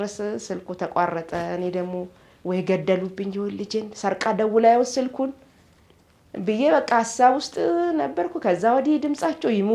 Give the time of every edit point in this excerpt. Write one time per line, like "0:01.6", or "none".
none